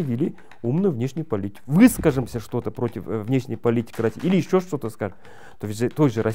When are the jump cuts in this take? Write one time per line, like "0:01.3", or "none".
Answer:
0:01.6